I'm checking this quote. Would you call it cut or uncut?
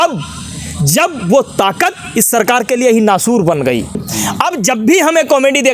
cut